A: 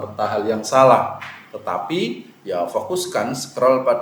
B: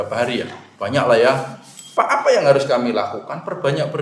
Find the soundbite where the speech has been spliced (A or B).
B